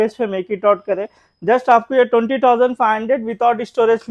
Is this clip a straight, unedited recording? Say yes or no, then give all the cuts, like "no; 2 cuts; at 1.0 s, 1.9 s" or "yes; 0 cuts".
yes; 0 cuts